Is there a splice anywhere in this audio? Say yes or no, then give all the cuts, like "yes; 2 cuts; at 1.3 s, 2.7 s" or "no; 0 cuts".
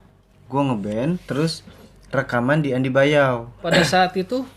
yes; 1 cut; at 3.7 s